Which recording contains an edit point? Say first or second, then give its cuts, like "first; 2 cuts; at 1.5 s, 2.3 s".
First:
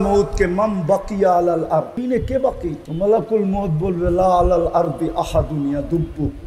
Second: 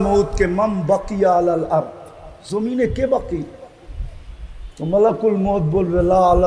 first; 2 cuts; at 2.0 s, 2.8 s